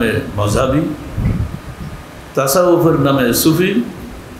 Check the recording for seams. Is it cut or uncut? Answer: uncut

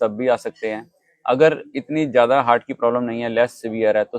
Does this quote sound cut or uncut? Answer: uncut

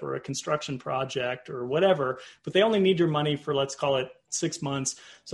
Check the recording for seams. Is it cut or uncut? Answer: uncut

